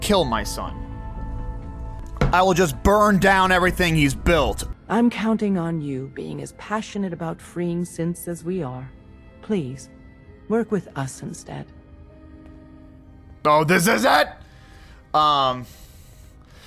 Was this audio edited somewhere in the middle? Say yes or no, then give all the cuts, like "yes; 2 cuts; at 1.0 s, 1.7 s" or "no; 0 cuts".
yes; 2 cuts; at 2.0 s, 4.8 s